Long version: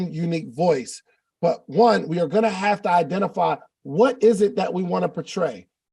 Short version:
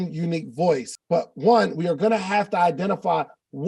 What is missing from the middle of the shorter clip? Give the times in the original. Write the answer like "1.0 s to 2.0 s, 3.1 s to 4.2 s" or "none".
0.9 s to 1.3 s